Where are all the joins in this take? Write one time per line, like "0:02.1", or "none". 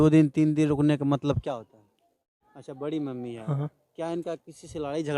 0:02.3